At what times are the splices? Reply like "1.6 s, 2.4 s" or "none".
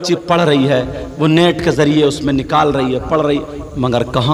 none